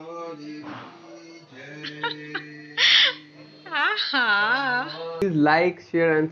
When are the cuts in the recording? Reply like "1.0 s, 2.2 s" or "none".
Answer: 5.2 s